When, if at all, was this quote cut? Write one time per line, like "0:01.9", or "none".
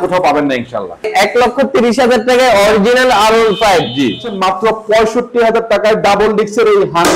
0:01.1
0:04.3